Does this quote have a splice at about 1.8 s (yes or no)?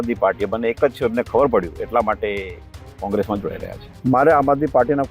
no